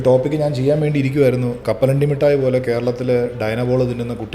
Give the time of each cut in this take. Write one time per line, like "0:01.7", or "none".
0:01.6